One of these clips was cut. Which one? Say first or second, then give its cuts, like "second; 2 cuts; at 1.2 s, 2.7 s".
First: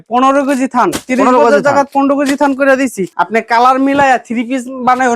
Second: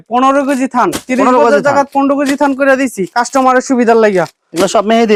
first; 1 cut; at 3.0 s